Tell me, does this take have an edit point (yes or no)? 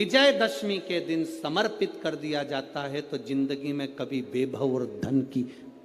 no